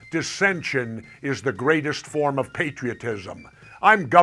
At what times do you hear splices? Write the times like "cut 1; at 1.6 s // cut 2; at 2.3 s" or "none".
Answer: cut 1; at 2.6 s